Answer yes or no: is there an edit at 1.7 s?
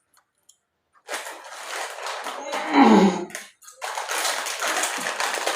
yes